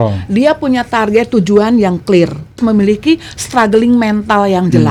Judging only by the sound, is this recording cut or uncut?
uncut